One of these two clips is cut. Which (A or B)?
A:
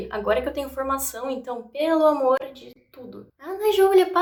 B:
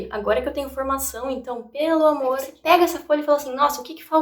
B